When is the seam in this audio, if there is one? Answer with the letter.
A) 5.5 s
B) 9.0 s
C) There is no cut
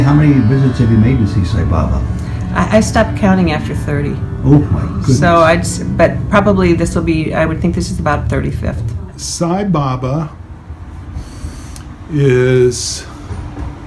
B